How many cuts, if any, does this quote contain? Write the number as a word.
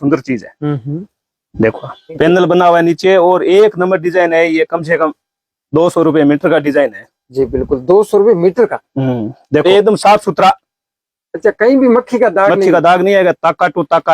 two